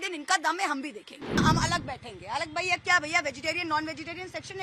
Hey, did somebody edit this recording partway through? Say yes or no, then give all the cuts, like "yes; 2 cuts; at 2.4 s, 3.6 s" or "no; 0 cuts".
yes; 1 cut; at 1.4 s